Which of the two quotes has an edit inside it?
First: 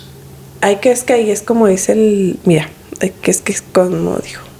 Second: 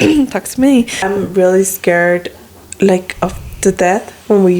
second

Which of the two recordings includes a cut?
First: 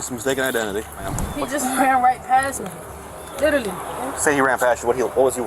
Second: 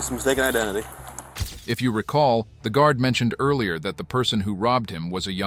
first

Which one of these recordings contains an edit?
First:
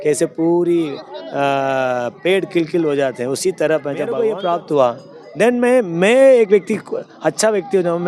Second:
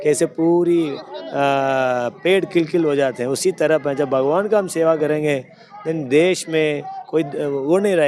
first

